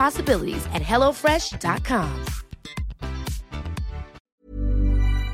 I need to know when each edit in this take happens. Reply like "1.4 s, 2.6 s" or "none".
4.3 s